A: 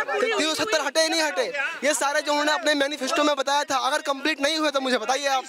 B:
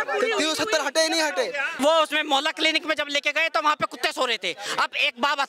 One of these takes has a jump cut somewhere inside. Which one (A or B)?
B